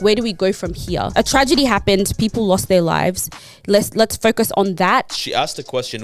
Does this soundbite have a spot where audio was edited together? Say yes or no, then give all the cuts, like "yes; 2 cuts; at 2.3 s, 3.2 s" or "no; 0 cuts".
yes; 2 cuts; at 1.1 s, 5.1 s